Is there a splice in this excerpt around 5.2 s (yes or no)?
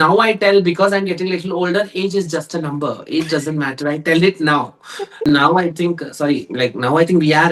yes